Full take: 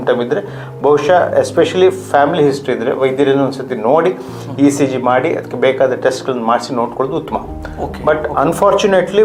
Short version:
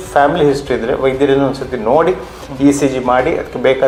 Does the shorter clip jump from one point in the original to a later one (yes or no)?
no